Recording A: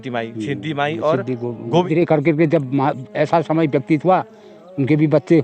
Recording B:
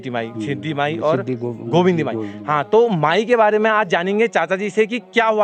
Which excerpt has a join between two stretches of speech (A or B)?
A